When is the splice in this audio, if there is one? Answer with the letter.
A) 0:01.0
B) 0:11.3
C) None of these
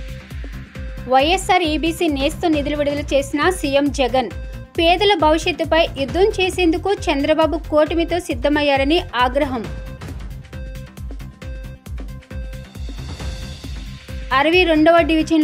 A